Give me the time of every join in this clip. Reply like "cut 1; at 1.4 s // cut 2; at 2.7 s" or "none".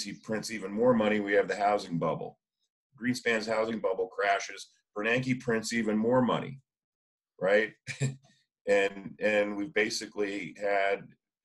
cut 1; at 2.9 s